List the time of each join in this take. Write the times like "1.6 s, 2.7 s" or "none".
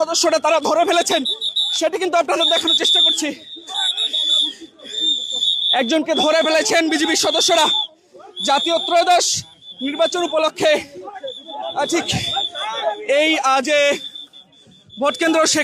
none